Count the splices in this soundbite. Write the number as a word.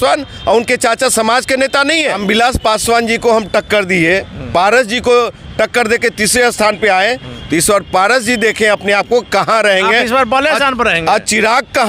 one